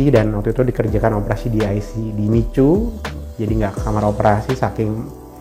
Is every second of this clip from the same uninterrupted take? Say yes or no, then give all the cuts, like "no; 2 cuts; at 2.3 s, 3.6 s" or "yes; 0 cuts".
yes; 0 cuts